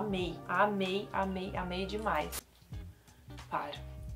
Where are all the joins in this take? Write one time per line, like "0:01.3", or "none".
0:02.3